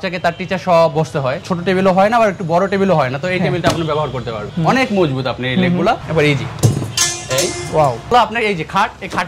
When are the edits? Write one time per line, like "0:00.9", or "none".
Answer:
0:01.4
0:04.4
0:06.0
0:08.1